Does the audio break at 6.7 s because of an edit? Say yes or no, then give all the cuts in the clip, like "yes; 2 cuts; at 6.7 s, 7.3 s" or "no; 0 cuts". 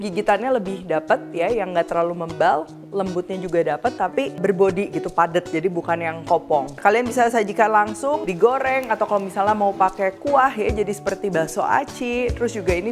yes; 3 cuts; at 4.4 s, 6.7 s, 8.2 s